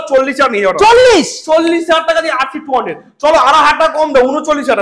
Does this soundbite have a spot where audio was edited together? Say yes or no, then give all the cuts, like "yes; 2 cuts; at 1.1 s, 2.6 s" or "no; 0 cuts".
no; 0 cuts